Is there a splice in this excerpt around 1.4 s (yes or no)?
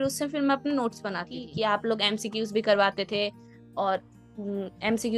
yes